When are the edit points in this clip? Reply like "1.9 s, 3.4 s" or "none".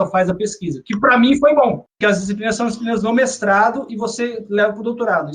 1.9 s